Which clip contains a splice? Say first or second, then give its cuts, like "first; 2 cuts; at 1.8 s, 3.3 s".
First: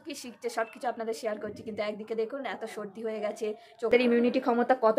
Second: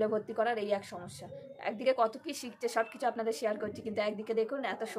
first; 1 cut; at 3.9 s